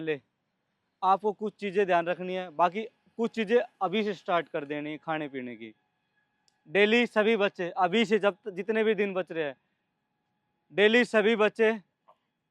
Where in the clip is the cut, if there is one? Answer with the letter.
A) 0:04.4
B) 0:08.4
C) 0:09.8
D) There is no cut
D